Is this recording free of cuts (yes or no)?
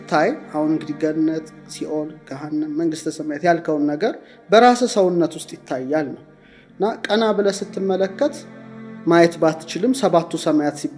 yes